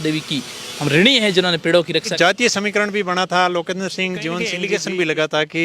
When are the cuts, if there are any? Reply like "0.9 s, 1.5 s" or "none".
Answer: 2.1 s, 4.6 s